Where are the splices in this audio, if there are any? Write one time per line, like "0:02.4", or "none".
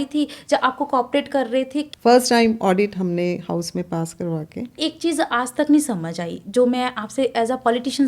0:01.9
0:04.8